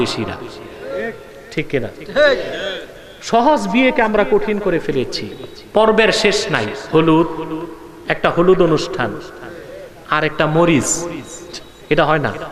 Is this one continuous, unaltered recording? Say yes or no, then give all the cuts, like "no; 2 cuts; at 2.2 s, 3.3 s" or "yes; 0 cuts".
yes; 0 cuts